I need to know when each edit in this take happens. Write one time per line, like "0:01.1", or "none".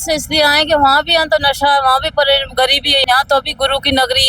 0:03.0